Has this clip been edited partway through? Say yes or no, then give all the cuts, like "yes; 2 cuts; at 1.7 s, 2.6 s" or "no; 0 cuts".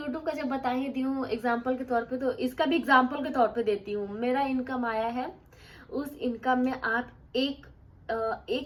no; 0 cuts